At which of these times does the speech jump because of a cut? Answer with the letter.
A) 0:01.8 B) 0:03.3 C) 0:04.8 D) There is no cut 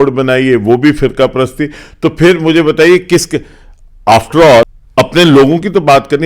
C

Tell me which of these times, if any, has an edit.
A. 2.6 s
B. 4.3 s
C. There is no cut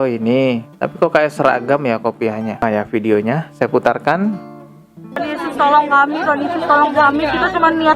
A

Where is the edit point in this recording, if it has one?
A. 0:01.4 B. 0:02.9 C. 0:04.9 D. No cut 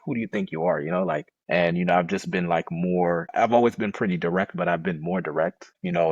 A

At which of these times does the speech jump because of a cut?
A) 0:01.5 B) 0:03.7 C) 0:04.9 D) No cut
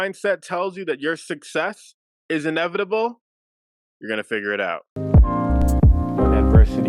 C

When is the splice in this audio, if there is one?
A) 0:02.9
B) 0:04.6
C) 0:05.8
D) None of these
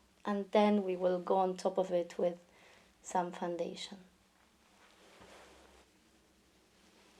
C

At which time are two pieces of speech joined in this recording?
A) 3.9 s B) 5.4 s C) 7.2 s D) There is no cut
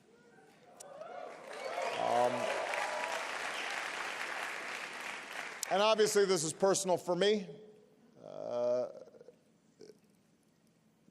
B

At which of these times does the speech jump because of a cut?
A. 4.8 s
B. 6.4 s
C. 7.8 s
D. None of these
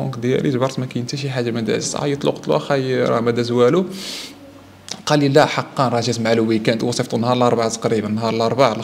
D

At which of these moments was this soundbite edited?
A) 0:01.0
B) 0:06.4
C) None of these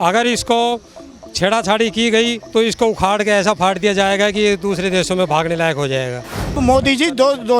B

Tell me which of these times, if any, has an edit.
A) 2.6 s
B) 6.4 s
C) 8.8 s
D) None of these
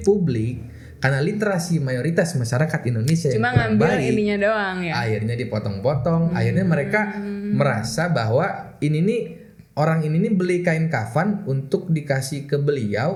D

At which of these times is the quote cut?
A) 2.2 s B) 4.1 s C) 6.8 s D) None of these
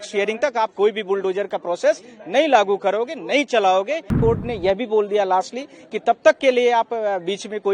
B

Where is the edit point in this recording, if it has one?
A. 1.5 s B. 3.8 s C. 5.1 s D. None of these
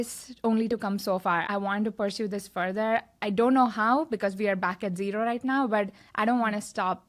A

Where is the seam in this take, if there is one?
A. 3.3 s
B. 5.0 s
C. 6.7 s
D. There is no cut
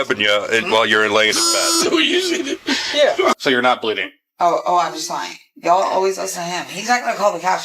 A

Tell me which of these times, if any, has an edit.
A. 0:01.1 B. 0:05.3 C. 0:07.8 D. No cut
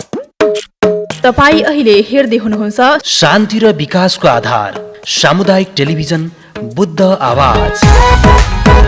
A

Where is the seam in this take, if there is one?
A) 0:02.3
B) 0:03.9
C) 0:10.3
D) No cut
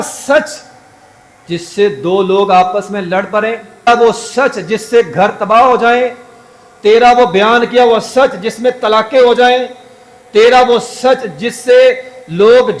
B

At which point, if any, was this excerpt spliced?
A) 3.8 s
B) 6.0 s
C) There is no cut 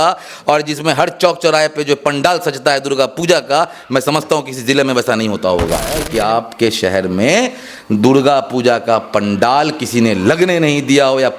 B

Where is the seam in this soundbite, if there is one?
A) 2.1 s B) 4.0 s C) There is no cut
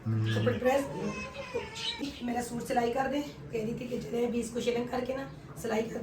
A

